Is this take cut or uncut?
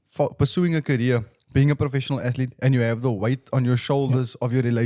uncut